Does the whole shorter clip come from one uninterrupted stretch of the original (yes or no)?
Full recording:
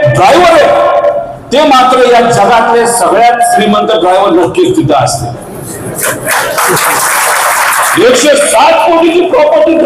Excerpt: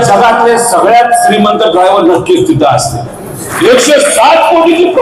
no